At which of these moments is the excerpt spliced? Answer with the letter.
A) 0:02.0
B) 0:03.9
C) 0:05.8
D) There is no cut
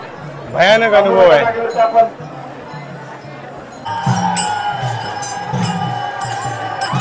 B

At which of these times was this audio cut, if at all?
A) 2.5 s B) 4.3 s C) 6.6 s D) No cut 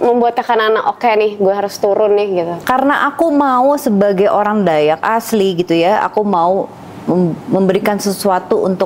A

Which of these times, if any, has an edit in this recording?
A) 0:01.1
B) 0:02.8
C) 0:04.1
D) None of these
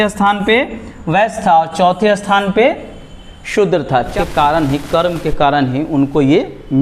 C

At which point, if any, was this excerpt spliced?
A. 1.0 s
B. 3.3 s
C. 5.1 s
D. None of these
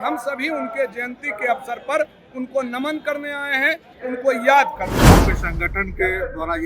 C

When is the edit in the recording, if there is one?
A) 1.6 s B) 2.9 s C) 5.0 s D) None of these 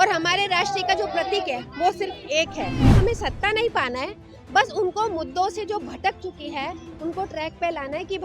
B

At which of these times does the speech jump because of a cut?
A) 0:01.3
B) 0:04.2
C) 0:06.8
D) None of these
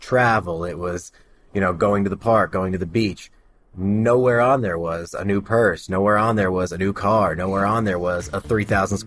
D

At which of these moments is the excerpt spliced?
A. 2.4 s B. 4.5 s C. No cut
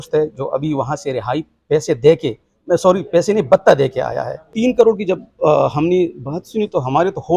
B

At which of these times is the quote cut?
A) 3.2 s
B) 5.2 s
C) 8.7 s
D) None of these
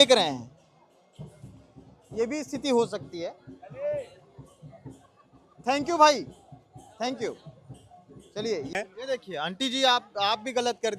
C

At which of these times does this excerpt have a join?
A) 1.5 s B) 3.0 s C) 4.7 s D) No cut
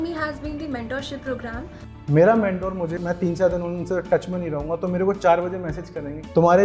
B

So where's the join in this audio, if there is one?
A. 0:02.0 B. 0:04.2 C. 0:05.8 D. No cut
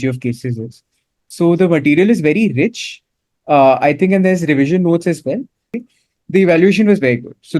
C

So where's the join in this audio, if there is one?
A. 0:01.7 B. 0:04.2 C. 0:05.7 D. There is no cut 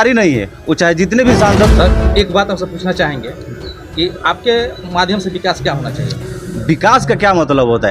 A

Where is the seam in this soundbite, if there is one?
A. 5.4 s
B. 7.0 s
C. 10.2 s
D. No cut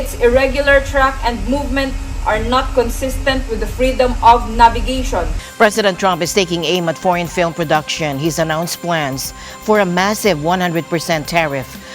A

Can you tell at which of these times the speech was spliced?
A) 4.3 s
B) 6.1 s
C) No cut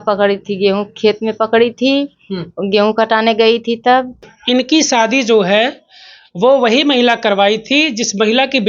A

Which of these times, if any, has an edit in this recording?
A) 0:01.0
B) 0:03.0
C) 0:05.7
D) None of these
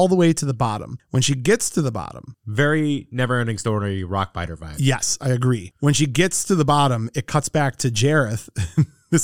D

